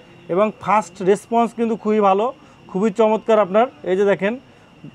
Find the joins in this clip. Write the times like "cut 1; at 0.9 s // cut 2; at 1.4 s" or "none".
none